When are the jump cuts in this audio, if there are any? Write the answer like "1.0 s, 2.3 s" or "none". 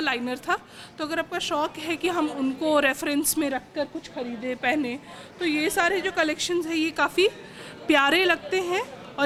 none